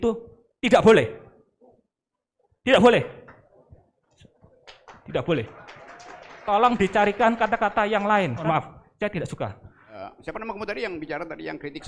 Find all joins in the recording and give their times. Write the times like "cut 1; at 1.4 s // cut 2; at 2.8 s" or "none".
cut 1; at 8.4 s // cut 2; at 10.0 s